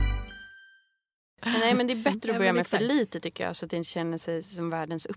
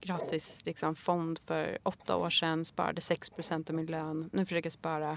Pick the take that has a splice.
first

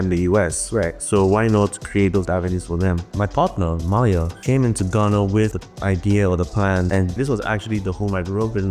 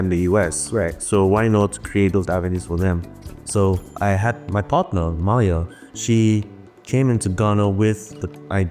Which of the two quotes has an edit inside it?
first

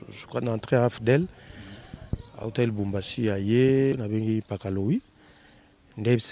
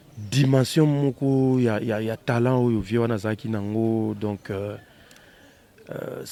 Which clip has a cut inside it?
first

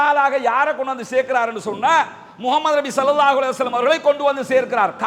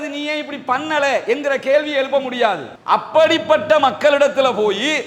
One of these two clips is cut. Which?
second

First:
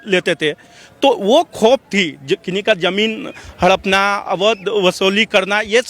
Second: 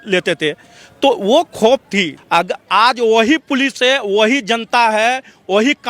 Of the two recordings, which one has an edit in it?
second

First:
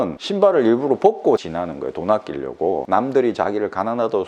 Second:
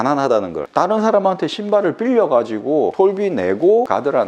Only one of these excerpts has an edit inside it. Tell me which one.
first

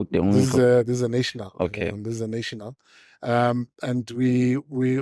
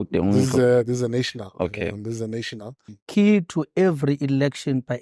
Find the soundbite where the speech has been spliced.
second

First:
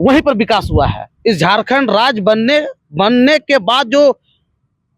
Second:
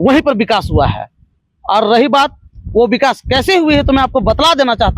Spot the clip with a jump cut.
first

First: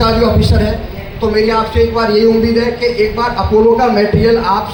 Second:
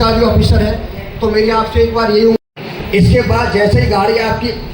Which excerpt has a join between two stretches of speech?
second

